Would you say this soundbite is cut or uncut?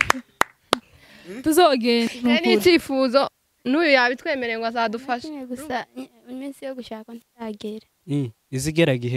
cut